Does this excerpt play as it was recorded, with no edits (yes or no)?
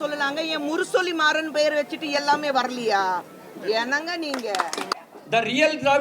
no